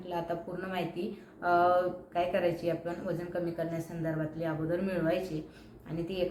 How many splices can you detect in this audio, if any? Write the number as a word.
zero